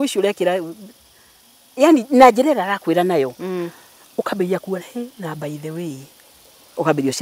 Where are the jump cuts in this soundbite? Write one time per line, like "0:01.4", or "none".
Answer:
none